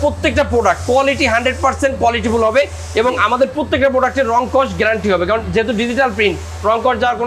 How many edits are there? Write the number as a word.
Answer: zero